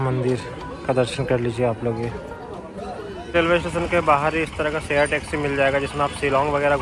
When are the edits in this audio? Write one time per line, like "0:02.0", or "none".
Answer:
0:03.3